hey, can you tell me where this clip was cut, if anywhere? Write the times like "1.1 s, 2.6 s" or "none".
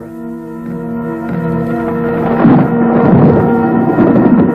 1.2 s